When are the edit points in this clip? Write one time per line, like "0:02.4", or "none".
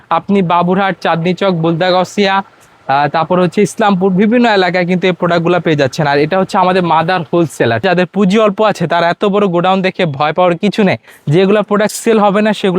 0:07.8
0:11.1